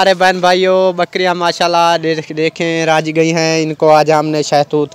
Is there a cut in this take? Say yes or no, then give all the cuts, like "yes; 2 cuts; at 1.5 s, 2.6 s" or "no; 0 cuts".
no; 0 cuts